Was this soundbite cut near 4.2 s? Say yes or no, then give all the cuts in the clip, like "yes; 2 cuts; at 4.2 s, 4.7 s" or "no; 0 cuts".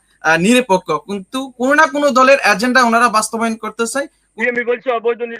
yes; 1 cut; at 4.2 s